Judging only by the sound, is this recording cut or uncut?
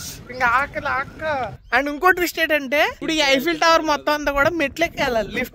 cut